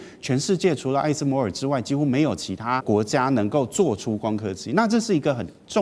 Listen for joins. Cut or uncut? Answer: cut